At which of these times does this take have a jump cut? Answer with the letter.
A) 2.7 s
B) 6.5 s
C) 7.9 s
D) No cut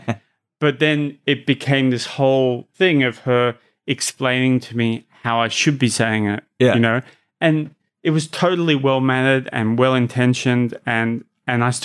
A